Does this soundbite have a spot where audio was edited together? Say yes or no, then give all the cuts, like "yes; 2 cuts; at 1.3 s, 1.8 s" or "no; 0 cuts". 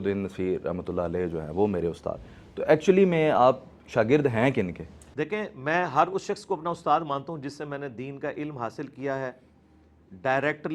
no; 0 cuts